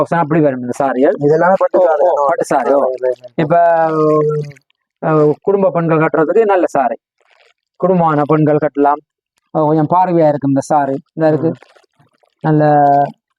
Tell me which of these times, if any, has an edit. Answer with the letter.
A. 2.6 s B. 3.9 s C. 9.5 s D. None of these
D